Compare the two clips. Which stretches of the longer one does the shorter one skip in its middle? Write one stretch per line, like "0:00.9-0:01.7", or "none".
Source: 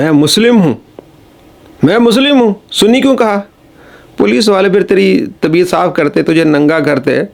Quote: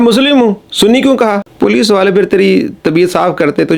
0:03.5-0:04.0